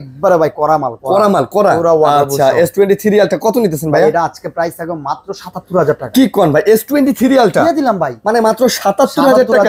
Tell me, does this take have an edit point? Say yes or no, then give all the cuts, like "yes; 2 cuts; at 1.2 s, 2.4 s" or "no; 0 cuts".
no; 0 cuts